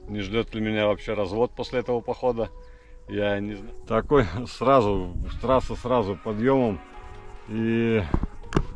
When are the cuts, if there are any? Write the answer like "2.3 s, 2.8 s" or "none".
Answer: 3.5 s